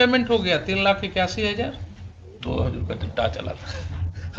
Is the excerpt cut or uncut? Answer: uncut